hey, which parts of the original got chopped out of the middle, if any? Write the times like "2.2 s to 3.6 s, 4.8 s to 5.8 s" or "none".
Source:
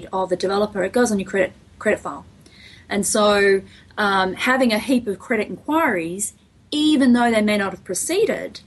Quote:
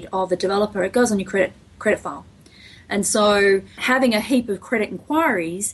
3.8 s to 4.4 s

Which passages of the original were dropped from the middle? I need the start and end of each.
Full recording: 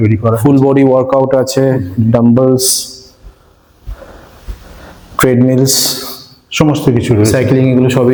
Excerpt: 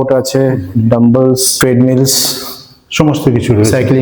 2.7 s to 5.1 s

